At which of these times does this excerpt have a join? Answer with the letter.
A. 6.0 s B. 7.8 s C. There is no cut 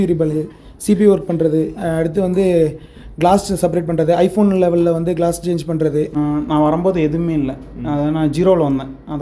C